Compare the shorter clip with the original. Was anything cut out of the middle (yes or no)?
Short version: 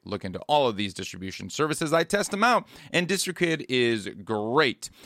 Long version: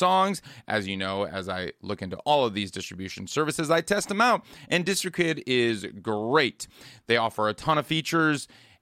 no